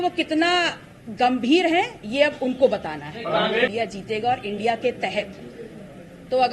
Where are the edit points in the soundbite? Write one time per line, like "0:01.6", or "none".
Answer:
0:03.7